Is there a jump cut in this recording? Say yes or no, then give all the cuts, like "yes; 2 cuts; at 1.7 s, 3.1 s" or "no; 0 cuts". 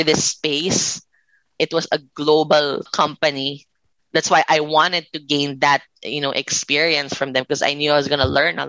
yes; 2 cuts; at 1.5 s, 2.9 s